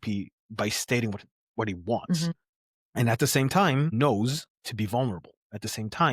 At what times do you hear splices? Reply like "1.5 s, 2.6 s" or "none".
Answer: 3.9 s